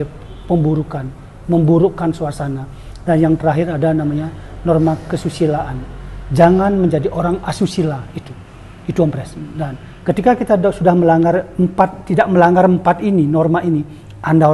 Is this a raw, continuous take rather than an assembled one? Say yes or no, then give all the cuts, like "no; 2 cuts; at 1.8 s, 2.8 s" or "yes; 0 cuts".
yes; 0 cuts